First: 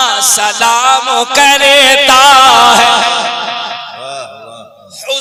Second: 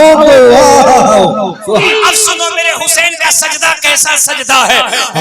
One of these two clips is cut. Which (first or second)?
second